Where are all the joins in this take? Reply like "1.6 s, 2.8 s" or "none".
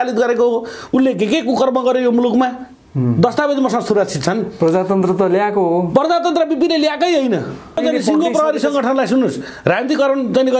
7.8 s